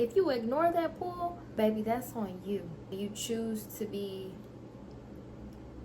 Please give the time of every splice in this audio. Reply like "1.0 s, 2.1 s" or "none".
1.4 s, 2.8 s